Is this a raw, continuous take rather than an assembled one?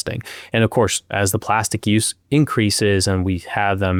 yes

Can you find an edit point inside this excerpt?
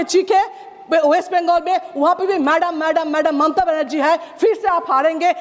no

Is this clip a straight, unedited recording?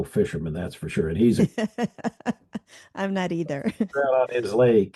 yes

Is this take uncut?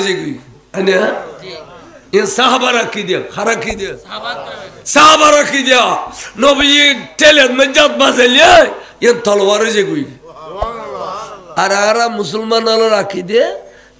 yes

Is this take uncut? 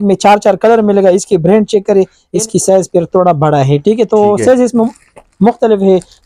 no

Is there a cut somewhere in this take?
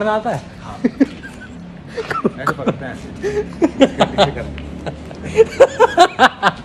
no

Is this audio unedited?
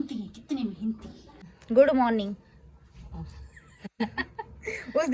no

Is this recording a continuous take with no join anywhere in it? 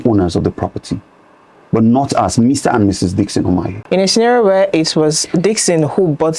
no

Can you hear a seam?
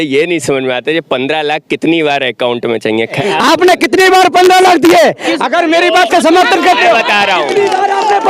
yes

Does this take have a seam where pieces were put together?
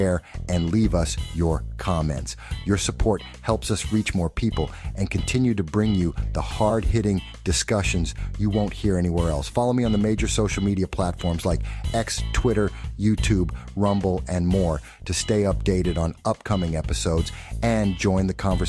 yes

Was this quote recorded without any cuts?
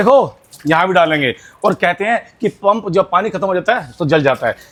yes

